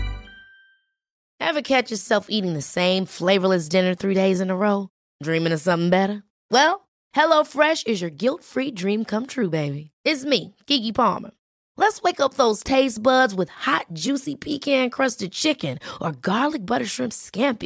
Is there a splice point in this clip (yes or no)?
yes